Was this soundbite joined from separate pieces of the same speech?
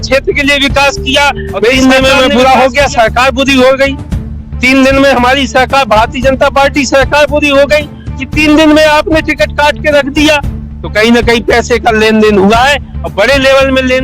yes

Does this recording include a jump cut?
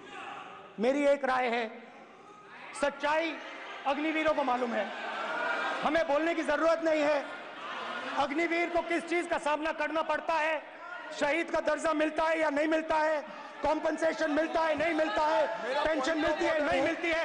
no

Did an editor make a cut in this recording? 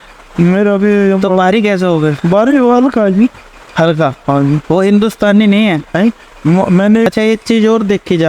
yes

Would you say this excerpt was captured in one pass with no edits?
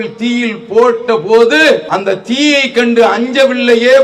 no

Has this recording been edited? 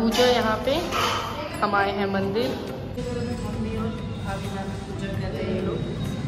yes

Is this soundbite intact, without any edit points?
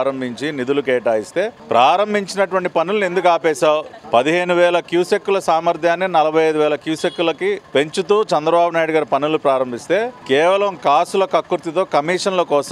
no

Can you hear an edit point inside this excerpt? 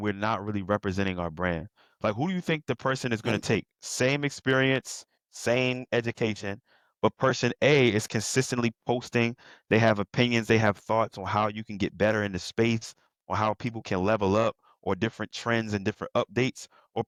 no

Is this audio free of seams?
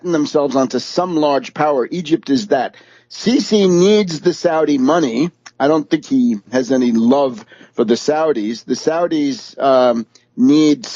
no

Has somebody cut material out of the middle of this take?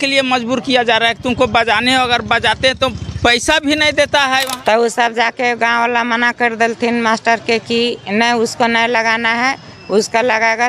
yes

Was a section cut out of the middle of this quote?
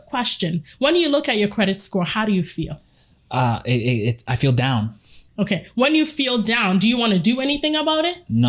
no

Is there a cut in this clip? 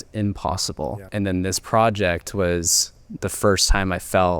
yes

